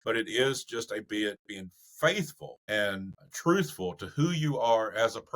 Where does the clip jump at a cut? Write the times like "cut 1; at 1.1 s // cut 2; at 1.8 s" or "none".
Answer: cut 1; at 3.0 s